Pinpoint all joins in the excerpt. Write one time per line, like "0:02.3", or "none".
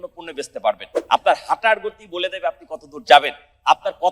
0:00.9